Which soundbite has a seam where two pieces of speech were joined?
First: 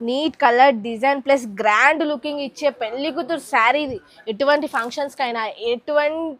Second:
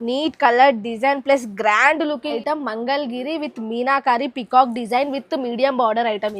second; 1 cut; at 2.4 s

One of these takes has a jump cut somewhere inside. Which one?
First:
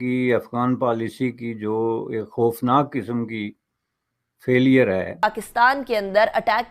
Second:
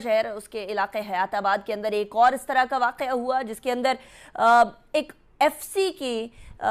first; 1 cut; at 5.2 s

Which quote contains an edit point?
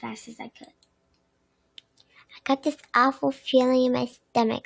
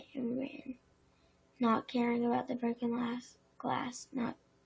first; 1 cut; at 1.7 s

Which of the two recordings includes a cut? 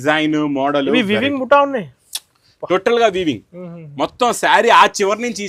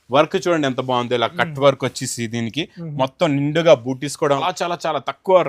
second; 1 cut; at 4.4 s

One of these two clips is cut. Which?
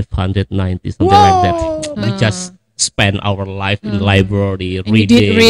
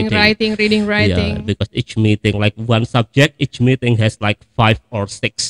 first; 1 cut; at 1.8 s

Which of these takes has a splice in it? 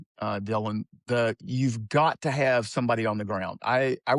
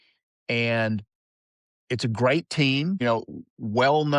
second; 1 cut; at 3.0 s

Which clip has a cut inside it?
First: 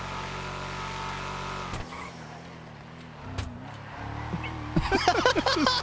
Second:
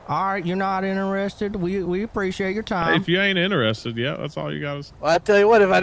second; 1 cut; at 4.8 s

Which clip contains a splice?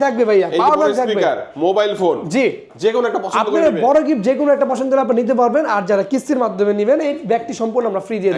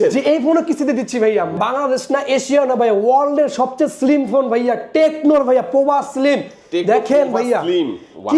second; 1 cut; at 1.5 s

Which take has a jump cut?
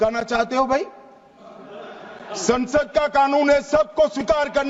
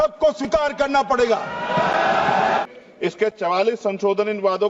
second; 1 cut; at 2.6 s

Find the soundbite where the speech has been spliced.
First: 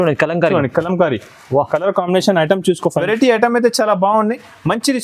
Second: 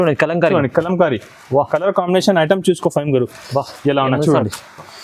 first; 1 cut; at 3.0 s

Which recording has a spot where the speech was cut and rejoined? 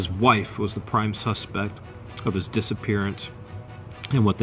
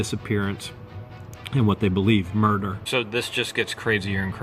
second; 1 cut; at 2.8 s

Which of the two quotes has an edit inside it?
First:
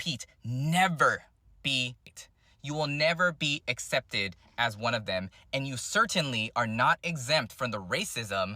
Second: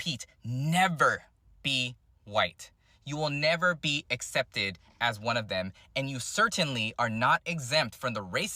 first; 1 cut; at 2.2 s

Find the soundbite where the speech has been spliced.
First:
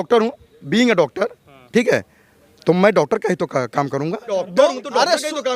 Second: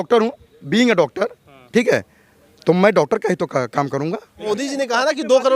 second; 1 cut; at 4.3 s

